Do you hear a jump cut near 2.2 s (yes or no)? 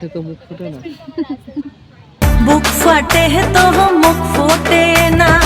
yes